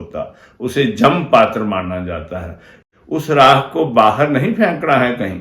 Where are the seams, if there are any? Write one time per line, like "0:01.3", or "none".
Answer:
0:02.8